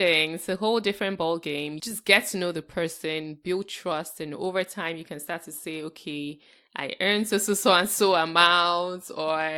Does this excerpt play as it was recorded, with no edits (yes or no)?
no